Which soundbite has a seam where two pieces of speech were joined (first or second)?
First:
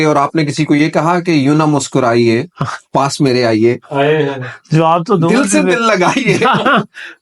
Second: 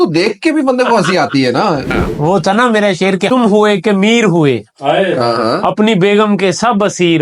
second